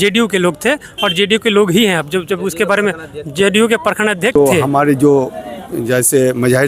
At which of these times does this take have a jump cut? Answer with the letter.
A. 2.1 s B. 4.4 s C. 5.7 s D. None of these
B